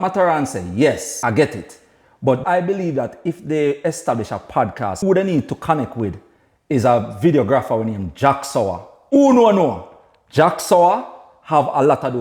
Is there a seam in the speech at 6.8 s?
no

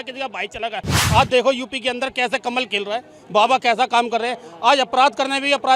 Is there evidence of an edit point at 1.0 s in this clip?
yes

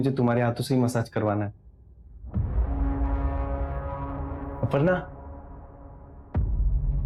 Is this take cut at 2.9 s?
no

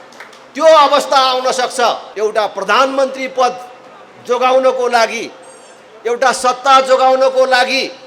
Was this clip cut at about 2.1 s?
yes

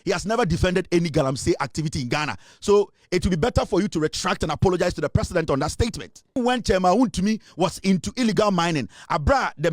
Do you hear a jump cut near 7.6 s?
no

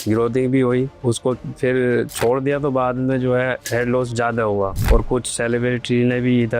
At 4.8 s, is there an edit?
yes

